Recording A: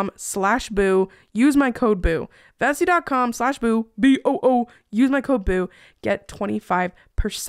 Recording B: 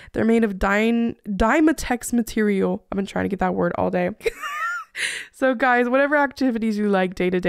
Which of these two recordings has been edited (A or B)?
B